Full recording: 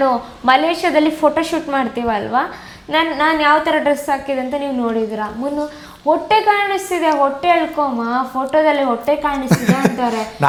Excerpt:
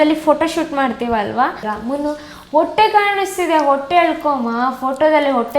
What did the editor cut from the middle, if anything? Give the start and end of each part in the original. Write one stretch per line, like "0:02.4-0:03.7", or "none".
0:02.6-0:05.2